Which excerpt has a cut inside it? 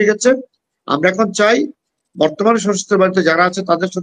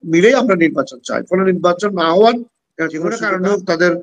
second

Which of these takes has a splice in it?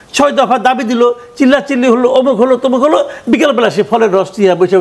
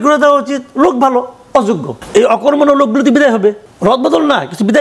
second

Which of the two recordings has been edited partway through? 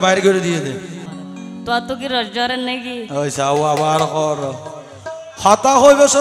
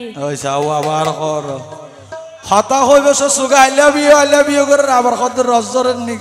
first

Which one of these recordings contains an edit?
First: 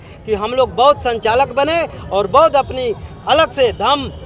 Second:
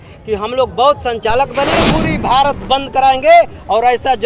second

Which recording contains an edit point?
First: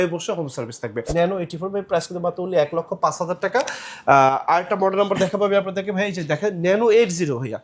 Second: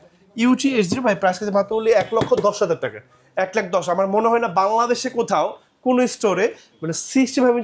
first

